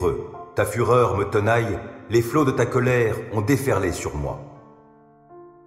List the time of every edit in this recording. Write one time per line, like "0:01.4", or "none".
0:04.5